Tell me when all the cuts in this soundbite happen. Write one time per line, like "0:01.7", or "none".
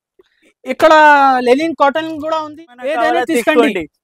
0:02.4